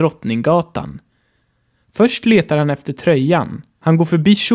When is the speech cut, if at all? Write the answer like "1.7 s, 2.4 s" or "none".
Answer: 1.2 s, 3.6 s